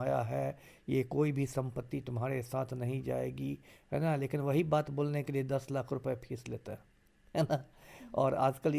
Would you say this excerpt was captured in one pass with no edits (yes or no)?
yes